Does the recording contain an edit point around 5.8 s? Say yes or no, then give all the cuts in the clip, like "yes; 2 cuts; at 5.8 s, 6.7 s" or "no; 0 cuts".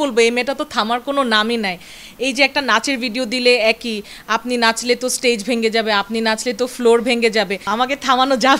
no; 1 cut; at 7.7 s